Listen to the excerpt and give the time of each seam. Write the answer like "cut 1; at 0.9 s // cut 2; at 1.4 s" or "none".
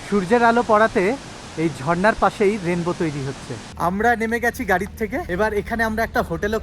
cut 1; at 3.6 s // cut 2; at 5.3 s